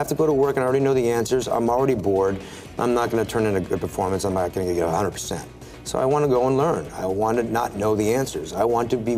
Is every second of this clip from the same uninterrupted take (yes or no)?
yes